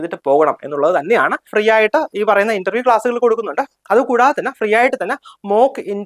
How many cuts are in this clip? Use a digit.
1